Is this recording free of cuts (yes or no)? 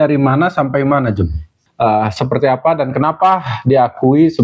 no